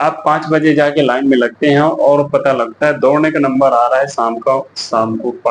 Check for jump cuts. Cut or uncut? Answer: uncut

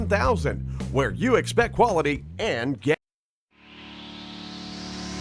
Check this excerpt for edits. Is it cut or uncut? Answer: cut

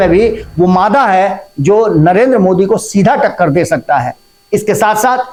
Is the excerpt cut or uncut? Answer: uncut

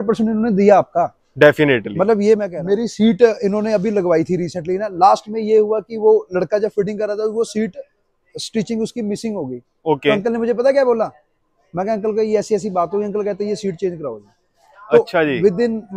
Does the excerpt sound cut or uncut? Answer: cut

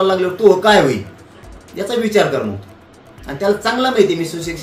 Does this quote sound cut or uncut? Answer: uncut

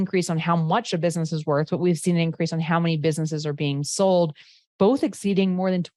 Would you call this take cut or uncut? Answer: uncut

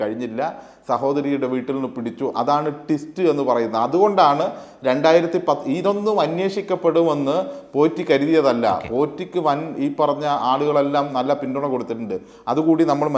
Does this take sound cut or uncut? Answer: uncut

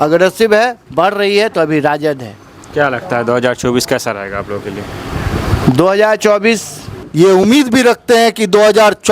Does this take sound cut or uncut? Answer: cut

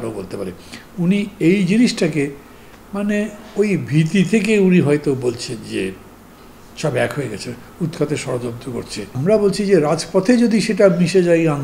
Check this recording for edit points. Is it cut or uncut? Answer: cut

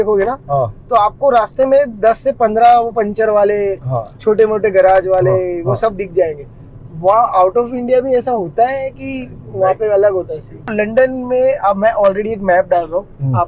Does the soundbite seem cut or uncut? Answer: cut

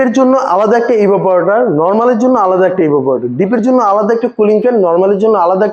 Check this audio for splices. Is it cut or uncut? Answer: uncut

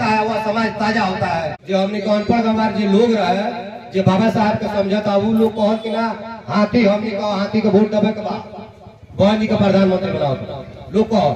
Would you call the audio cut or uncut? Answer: cut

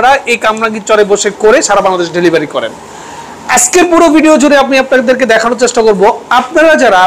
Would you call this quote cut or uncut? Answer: uncut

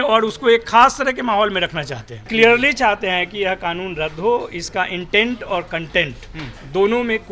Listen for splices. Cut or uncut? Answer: cut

